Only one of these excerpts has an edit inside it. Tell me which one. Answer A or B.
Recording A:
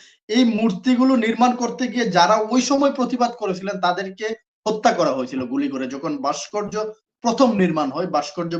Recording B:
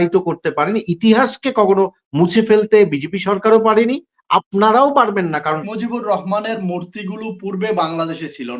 B